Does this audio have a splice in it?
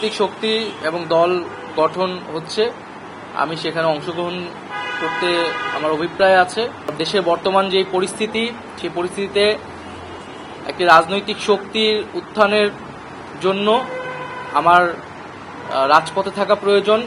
yes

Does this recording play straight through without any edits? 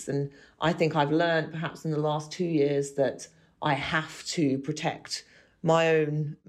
yes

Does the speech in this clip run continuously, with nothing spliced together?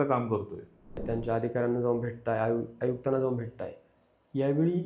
no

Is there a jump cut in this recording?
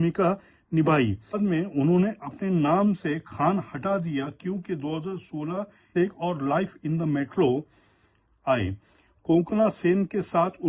yes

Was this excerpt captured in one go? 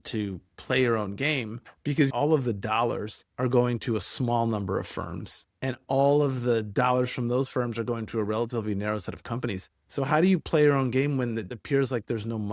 no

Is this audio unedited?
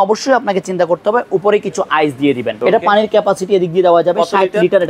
no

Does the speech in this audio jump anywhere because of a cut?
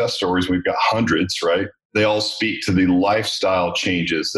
yes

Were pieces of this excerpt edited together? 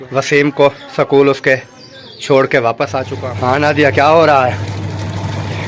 yes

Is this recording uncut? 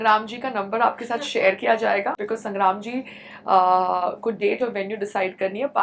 no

